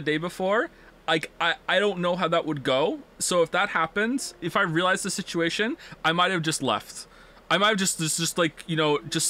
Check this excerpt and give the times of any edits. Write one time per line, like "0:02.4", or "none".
0:03.1
0:04.4